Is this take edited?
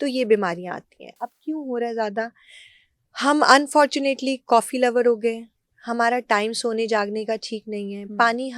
no; 0 cuts

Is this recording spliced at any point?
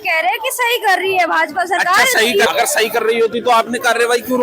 yes; 1 cut; at 2.5 s

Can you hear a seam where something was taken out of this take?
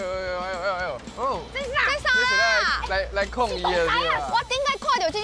yes; 1 cut; at 4.3 s

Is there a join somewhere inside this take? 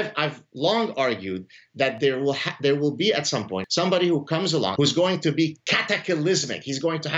yes; 2 cuts; at 3.6 s, 4.7 s

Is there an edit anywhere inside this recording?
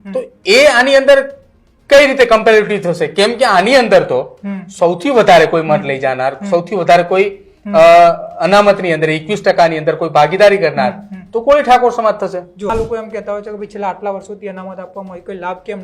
yes; 1 cut; at 12.7 s

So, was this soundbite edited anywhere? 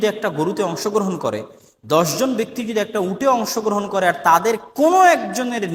no; 0 cuts

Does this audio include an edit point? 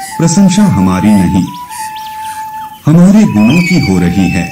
yes; 2 cuts; at 1.6 s, 2.7 s

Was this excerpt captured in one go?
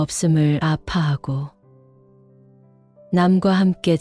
yes; 0 cuts

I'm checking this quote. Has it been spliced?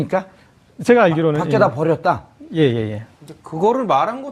yes; 1 cut; at 3.3 s

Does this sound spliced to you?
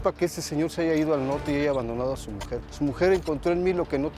yes; 1 cut; at 2.6 s

